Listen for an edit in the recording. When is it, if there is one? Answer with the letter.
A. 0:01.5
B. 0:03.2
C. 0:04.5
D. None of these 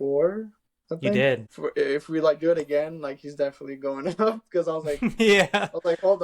A